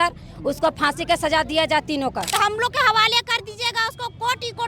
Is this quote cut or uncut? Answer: cut